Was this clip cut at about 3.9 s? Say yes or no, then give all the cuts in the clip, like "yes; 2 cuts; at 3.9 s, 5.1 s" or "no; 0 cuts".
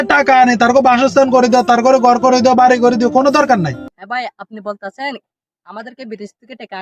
yes; 1 cut; at 3.9 s